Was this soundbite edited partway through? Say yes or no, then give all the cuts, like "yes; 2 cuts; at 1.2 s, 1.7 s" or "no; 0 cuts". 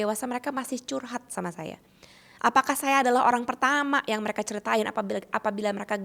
no; 0 cuts